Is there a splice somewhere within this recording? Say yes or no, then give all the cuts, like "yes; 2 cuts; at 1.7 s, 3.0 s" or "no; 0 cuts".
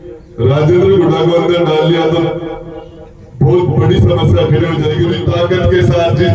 yes; 1 cut; at 5.0 s